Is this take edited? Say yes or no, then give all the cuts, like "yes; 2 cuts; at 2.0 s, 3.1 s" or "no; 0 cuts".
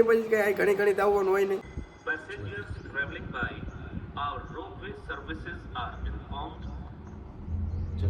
yes; 1 cut; at 1.6 s